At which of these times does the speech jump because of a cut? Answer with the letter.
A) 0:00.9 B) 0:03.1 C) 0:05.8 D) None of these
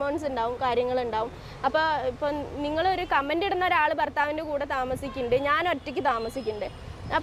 D